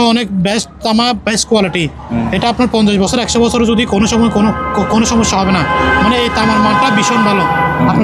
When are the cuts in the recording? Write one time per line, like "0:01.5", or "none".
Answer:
none